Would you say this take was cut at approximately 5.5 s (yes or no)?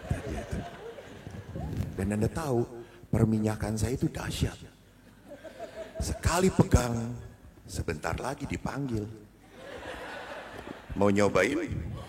no